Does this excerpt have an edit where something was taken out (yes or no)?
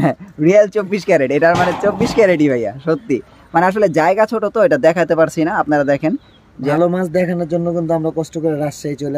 yes